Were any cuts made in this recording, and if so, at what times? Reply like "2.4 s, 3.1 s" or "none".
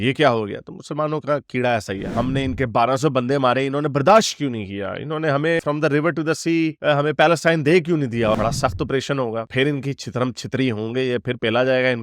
2.1 s, 8.3 s